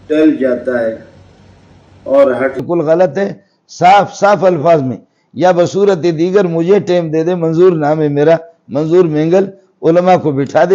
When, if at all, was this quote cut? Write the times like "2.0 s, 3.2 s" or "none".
2.6 s